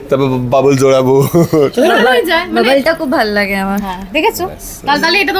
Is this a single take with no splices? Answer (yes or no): yes